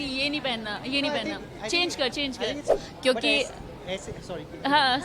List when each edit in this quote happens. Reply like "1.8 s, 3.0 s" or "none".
2.7 s